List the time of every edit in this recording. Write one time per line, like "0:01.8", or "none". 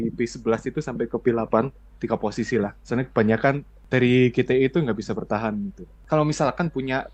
0:01.9
0:03.7
0:05.9

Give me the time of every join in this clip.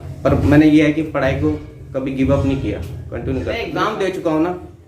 0:03.6

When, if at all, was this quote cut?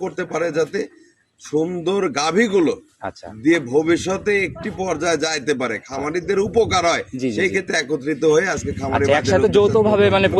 none

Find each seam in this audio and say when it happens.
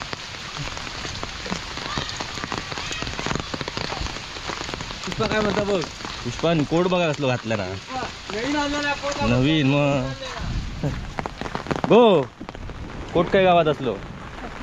none

